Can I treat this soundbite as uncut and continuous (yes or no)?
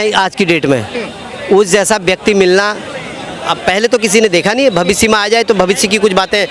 yes